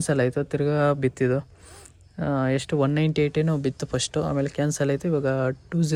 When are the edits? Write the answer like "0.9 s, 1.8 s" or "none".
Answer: none